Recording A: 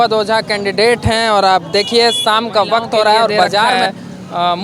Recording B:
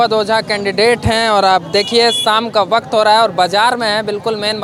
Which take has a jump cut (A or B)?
A